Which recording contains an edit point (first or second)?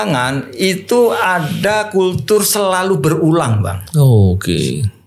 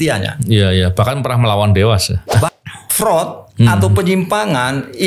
second